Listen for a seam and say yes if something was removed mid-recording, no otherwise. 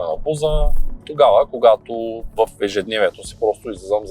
no